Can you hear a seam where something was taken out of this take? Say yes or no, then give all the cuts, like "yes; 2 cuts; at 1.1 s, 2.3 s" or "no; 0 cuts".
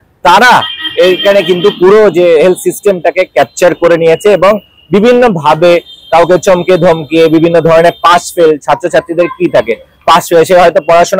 no; 0 cuts